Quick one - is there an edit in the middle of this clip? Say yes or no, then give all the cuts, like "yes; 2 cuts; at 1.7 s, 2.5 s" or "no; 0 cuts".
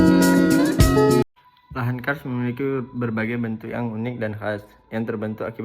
yes; 1 cut; at 1.2 s